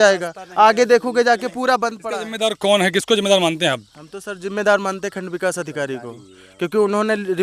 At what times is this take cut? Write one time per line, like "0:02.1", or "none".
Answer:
0:02.0